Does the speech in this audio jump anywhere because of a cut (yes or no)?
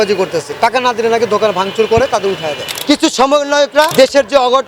yes